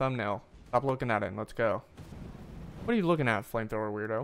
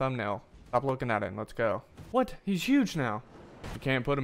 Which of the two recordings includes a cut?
second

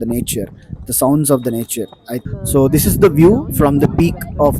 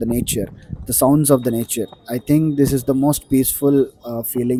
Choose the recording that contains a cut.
first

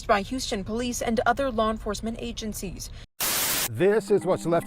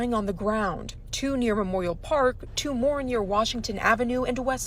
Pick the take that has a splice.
first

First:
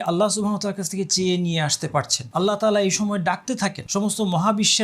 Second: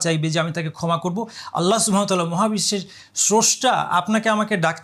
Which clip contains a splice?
first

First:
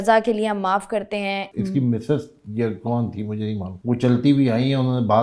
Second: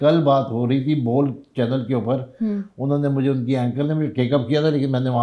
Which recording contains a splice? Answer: first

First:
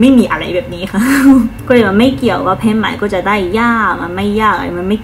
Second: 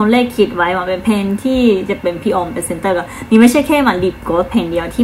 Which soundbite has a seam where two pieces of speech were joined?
first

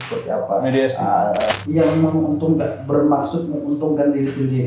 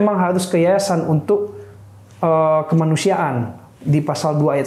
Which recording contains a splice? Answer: first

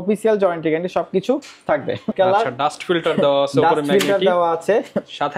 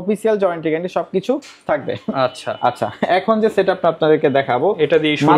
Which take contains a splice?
first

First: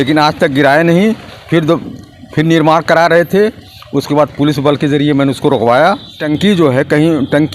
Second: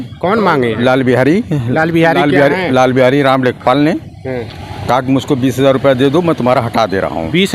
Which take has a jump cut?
first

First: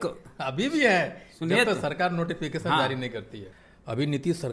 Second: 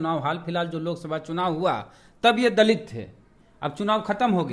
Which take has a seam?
first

